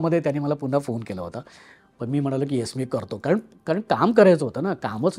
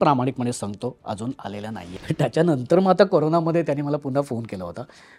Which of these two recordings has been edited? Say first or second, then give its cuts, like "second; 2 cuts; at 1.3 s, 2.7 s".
second; 1 cut; at 1.9 s